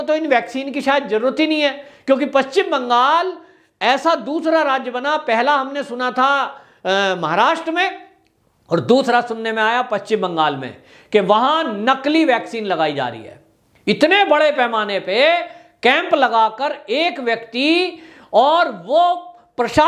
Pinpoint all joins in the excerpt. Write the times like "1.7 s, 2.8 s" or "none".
none